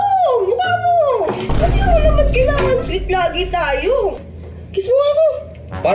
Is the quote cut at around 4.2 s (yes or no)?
yes